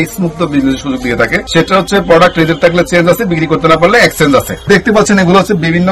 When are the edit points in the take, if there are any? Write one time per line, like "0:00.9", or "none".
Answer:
0:01.5
0:04.7